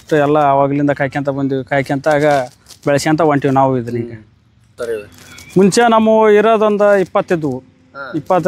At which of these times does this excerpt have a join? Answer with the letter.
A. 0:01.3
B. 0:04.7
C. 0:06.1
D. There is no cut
B